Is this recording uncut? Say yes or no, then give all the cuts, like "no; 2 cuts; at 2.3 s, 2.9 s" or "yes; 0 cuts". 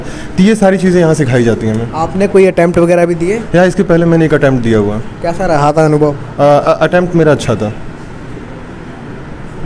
yes; 0 cuts